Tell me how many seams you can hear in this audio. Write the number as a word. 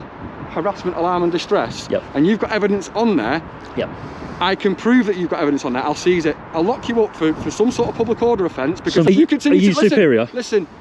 one